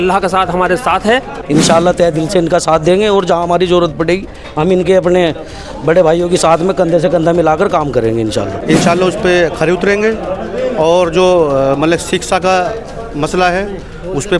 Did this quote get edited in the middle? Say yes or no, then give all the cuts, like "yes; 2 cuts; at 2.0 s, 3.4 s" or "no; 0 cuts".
yes; 2 cuts; at 1.4 s, 8.6 s